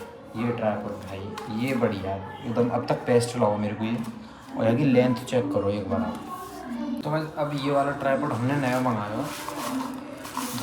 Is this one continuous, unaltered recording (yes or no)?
yes